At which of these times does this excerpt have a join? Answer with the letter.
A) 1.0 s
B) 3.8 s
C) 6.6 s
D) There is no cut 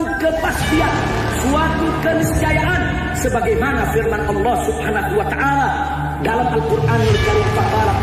D